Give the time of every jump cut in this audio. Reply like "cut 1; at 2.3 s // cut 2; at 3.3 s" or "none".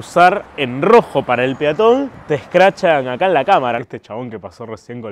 cut 1; at 3.8 s